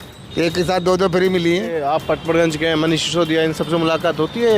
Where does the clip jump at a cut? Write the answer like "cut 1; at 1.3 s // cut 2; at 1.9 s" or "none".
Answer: cut 1; at 1.8 s